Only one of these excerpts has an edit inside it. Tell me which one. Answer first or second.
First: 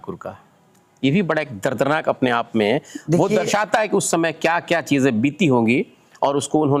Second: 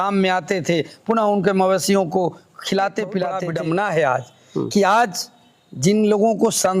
second